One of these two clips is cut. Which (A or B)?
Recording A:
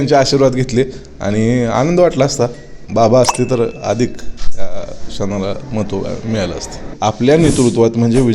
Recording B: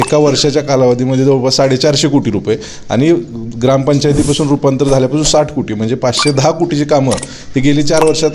A